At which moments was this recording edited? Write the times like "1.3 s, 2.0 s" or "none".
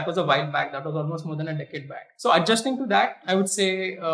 2.0 s, 3.2 s